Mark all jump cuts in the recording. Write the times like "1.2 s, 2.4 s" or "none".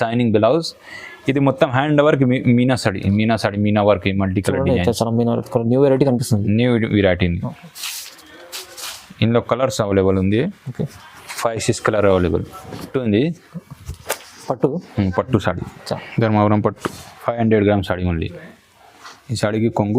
12.9 s